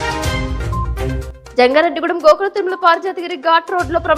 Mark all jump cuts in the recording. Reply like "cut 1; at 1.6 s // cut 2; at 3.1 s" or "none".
cut 1; at 1.4 s